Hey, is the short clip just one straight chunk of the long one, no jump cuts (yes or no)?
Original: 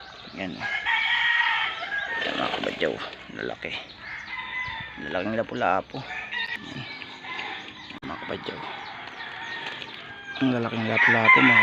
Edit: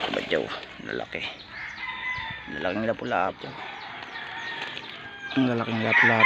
no